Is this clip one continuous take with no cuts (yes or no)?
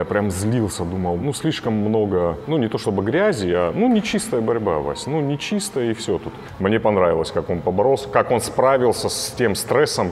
no